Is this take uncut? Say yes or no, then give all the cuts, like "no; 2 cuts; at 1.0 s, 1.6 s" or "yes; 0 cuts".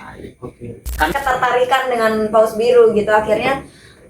no; 1 cut; at 1.1 s